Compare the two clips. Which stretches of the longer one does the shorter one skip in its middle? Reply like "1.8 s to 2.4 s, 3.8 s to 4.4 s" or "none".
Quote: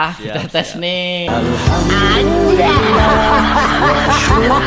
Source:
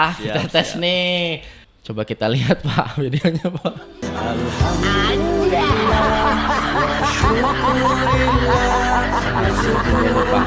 1.3 s to 4.2 s